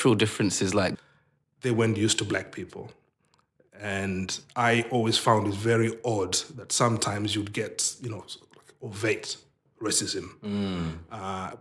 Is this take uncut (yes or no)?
no